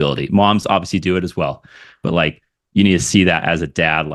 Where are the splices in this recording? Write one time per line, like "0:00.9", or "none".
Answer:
none